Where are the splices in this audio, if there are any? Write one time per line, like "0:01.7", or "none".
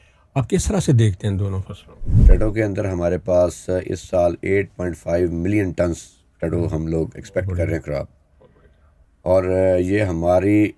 0:02.1

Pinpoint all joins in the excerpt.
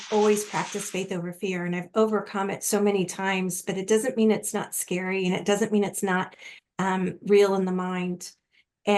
none

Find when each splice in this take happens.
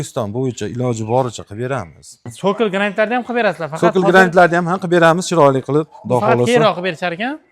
0:02.2

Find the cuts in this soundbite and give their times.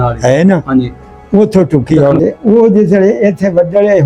0:02.2

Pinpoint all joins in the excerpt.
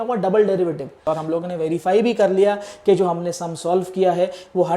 0:01.2

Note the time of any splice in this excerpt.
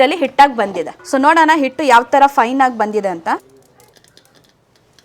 0:00.9
0:03.4

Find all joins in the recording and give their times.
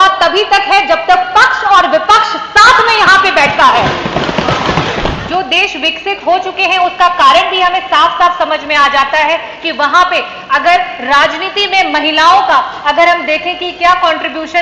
0:05.2

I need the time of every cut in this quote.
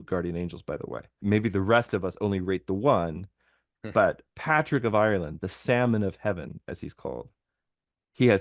0:01.2

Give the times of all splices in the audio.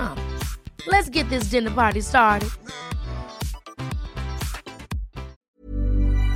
0:05.3

